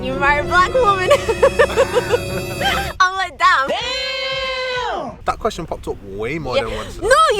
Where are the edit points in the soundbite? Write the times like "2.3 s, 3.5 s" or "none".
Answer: none